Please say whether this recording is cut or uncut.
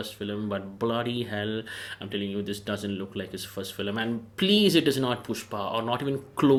uncut